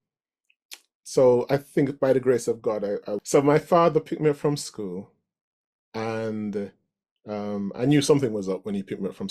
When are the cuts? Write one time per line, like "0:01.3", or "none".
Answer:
0:03.1